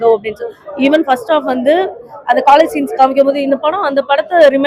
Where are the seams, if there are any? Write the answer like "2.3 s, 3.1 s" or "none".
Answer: none